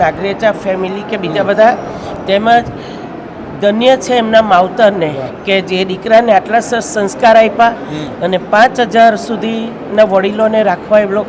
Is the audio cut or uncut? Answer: uncut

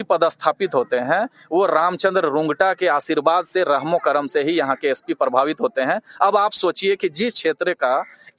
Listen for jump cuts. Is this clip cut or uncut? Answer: uncut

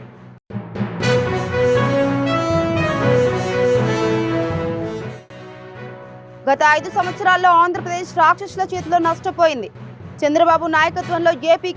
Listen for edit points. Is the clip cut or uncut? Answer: cut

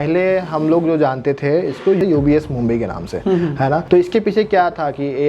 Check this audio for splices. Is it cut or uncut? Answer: cut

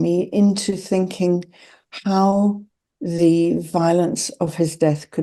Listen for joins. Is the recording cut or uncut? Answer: uncut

